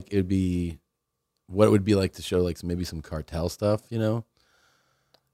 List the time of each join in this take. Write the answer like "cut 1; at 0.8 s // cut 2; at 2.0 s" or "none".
none